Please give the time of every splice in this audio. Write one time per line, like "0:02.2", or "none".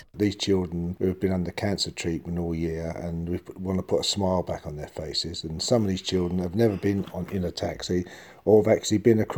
0:00.9

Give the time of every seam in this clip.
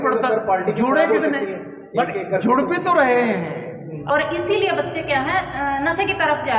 0:04.0

